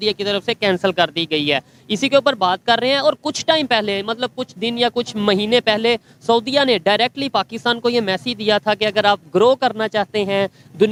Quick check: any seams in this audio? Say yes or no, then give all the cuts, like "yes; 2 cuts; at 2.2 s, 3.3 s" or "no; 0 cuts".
no; 0 cuts